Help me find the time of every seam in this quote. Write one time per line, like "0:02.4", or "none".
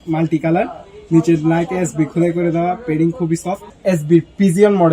0:03.7